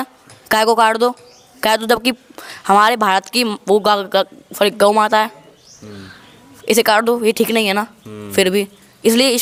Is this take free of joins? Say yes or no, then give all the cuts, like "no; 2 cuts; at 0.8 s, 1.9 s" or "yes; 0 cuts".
yes; 0 cuts